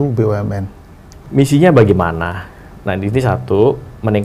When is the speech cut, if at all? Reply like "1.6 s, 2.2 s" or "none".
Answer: 1.2 s